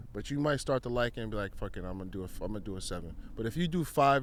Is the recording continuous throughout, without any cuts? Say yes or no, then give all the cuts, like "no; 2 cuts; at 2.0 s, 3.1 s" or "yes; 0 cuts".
yes; 0 cuts